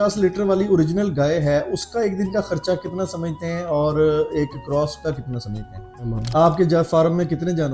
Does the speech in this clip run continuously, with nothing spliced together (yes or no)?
no